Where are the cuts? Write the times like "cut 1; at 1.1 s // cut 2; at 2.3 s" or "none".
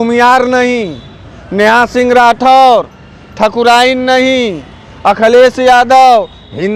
none